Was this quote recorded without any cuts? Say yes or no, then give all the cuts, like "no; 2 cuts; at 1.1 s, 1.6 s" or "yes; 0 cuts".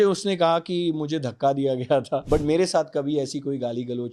no; 1 cut; at 2.2 s